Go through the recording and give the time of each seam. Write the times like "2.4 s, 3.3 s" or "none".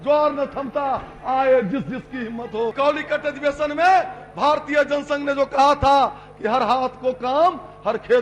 2.7 s